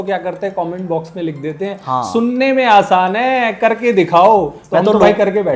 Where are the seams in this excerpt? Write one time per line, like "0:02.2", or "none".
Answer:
none